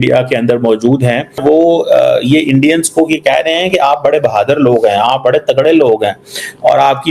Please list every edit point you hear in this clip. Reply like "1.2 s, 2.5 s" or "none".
1.4 s